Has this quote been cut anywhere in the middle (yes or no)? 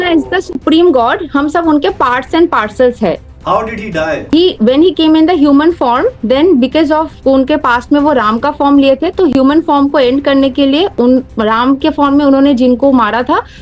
no